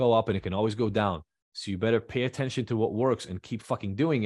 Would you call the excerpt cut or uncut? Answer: uncut